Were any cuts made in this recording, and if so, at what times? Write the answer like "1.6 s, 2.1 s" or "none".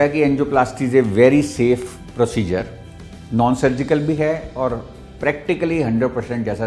none